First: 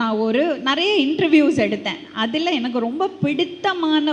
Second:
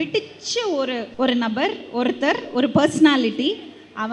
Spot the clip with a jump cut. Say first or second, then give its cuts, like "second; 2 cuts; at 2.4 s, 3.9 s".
second; 1 cut; at 1.1 s